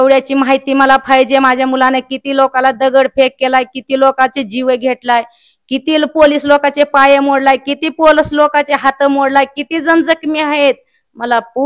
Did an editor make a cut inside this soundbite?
no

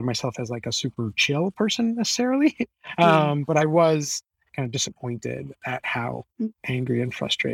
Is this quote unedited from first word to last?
yes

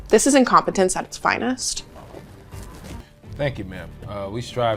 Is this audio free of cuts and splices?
no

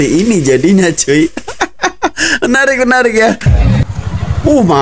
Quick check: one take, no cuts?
no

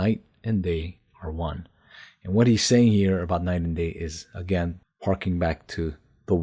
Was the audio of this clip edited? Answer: yes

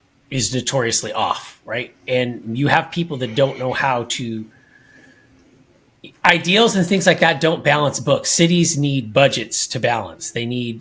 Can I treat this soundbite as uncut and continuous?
yes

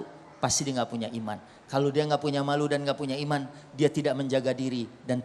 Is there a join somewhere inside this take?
no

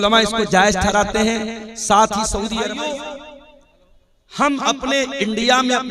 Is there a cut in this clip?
yes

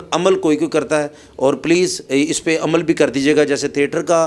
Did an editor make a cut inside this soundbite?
no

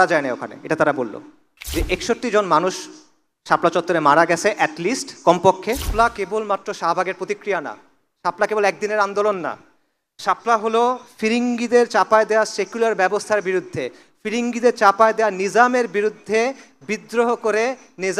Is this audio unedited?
no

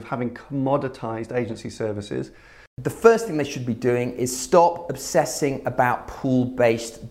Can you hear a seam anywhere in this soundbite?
yes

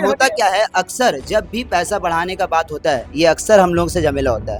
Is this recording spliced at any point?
no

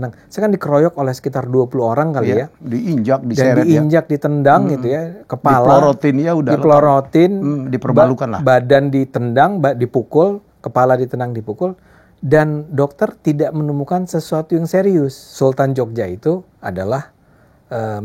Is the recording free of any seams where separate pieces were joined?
no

